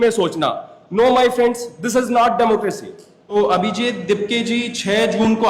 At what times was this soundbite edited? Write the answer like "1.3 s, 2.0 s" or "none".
3.3 s